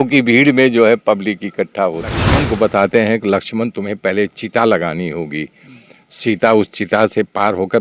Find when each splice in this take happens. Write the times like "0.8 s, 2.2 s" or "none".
2.3 s

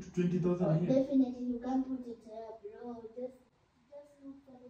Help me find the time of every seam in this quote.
none

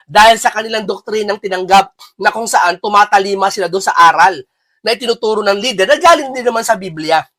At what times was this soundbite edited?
none

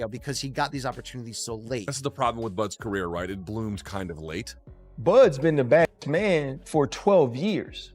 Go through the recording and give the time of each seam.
4.5 s

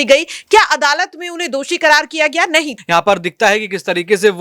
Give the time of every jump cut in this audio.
2.7 s

